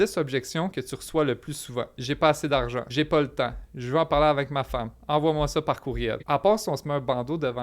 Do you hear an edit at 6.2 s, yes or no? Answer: yes